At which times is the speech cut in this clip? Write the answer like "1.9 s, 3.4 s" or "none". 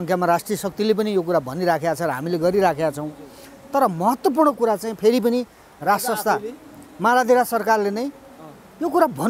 none